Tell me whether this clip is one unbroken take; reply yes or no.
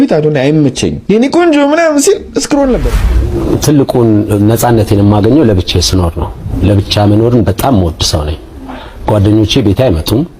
no